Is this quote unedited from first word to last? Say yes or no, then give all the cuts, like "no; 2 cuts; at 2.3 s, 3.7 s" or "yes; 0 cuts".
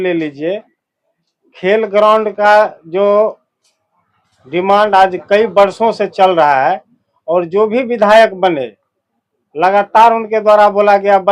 yes; 0 cuts